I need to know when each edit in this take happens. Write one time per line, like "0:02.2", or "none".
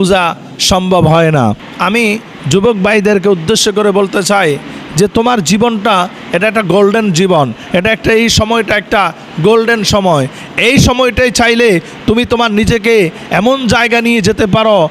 0:01.7